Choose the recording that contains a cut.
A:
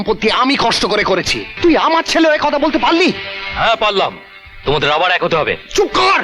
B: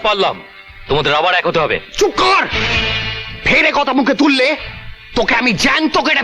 A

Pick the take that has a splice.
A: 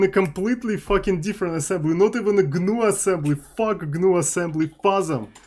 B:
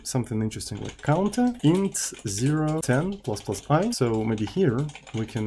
B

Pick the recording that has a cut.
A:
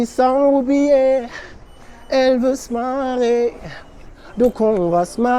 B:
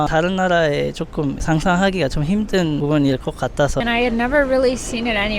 B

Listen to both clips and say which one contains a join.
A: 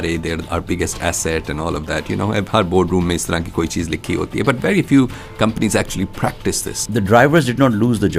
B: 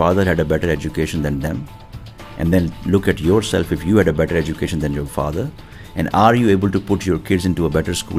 A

